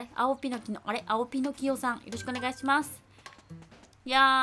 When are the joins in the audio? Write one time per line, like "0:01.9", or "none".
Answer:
none